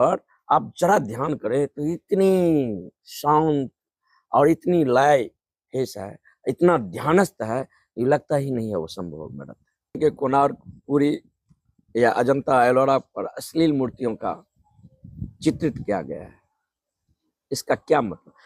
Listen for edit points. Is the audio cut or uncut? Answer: cut